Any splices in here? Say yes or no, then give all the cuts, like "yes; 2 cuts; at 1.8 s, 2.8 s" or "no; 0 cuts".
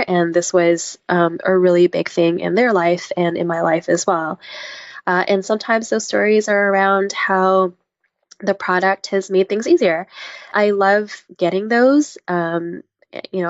yes; 1 cut; at 10.5 s